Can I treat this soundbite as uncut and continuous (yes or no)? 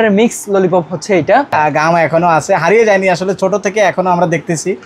no